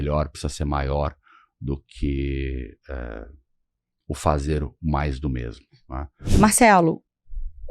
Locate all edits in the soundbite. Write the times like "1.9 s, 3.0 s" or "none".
6.1 s